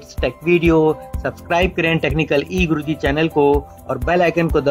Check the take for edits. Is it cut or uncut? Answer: uncut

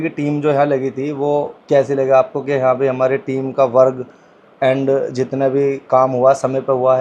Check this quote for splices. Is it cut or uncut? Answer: cut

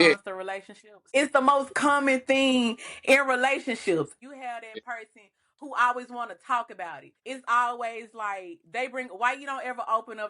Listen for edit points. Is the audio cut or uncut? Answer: cut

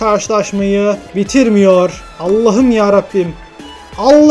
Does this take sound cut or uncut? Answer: cut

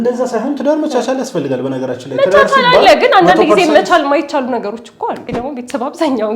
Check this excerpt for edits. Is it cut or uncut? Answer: cut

